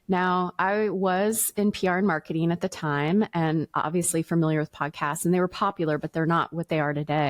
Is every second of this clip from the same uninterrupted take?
yes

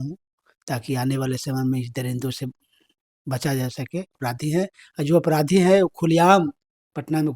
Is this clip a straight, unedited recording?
no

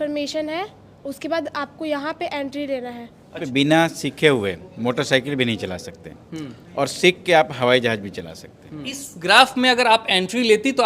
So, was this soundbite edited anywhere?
yes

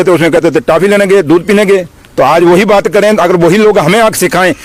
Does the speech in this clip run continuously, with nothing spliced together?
yes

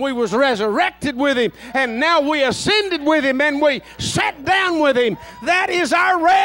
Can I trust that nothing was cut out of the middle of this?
yes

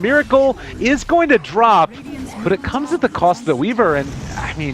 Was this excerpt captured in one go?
no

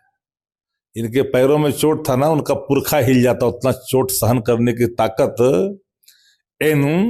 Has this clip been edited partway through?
no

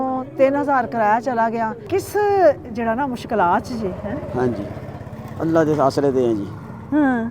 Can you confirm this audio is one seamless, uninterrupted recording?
no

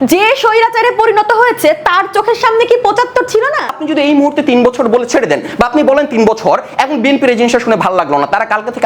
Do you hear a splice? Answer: yes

